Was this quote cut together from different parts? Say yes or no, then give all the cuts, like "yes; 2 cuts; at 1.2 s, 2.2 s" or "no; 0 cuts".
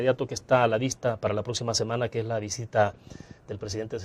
yes; 1 cut; at 1.4 s